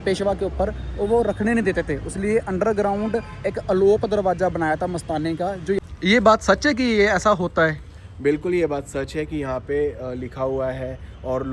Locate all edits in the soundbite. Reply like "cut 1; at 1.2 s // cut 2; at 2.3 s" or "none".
cut 1; at 5.9 s